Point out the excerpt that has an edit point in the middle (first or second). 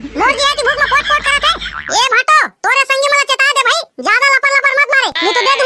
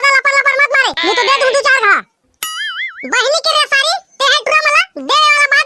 first